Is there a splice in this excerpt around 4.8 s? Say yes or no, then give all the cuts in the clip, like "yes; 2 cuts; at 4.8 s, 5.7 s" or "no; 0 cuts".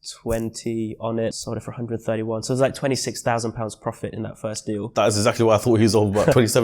yes; 2 cuts; at 1.4 s, 4.8 s